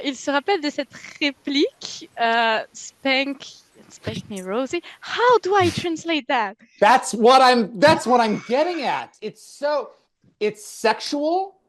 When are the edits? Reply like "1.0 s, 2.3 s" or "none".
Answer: none